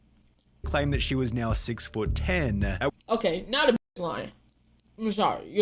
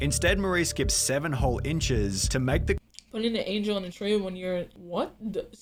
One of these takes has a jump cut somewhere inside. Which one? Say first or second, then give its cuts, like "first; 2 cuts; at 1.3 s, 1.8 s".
first; 1 cut; at 4.0 s